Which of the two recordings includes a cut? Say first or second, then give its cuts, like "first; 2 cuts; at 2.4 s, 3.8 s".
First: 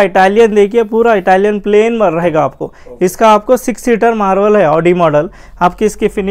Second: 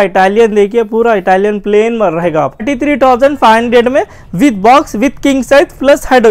second; 1 cut; at 2.7 s